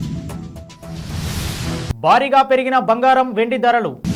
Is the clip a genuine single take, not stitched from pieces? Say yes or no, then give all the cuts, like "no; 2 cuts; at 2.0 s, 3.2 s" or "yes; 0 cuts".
yes; 0 cuts